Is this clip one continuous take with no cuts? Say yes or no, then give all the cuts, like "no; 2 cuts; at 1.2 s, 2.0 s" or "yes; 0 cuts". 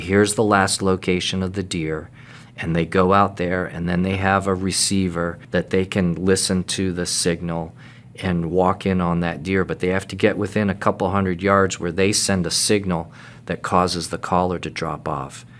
no; 1 cut; at 5.4 s